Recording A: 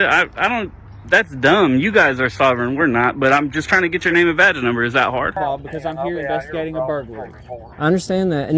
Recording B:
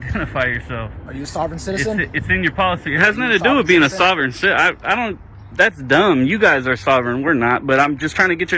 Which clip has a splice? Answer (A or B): A